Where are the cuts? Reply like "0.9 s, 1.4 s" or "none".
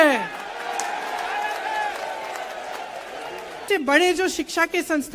3.6 s